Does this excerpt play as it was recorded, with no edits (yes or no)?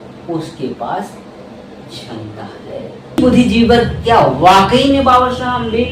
no